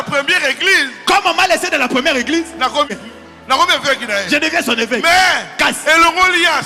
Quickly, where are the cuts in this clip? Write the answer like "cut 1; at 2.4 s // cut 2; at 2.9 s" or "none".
cut 1; at 2.9 s